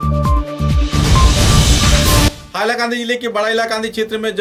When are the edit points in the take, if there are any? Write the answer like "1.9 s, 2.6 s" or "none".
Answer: none

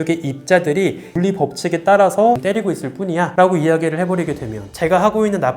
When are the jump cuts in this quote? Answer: 1.1 s, 2.4 s, 4.7 s

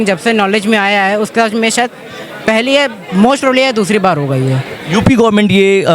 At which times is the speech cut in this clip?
none

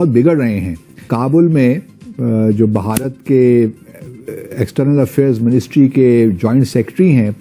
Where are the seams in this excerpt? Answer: 1.1 s

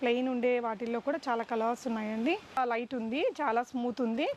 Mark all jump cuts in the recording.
2.6 s

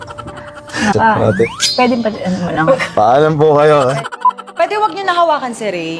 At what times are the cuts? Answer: 0.9 s, 4.0 s

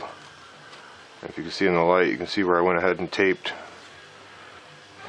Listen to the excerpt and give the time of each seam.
3.5 s

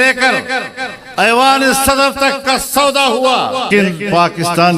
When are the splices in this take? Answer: 3.7 s

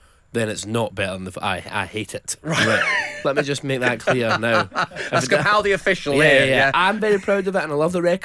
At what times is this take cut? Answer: 3.1 s

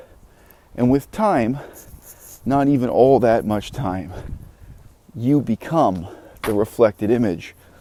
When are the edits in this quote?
none

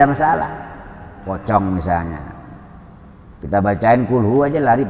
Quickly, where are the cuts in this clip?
1.3 s

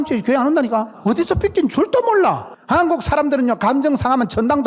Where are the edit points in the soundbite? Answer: 0.9 s, 2.5 s

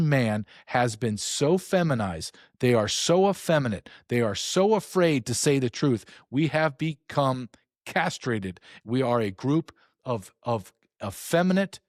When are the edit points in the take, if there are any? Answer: none

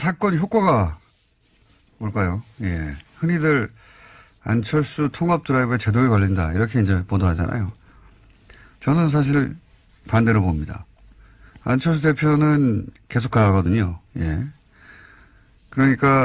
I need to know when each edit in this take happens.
14.4 s

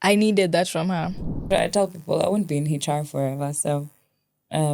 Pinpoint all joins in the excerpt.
1.4 s

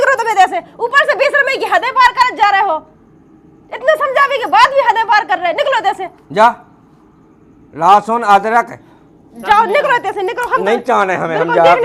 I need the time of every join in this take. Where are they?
none

